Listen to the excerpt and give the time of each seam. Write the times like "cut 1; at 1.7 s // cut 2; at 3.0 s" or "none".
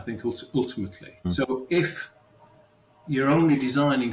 cut 1; at 1.3 s